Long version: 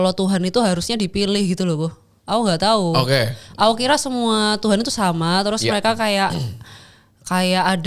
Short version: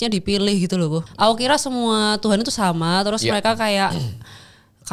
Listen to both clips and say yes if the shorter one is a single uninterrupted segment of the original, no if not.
no